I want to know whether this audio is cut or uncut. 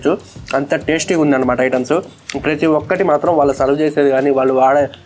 uncut